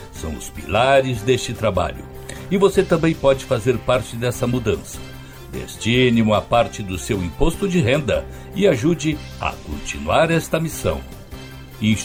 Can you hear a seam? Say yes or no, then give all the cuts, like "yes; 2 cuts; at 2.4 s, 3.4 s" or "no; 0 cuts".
no; 0 cuts